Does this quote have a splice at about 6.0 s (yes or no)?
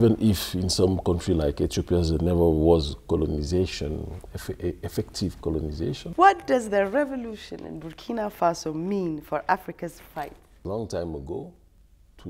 yes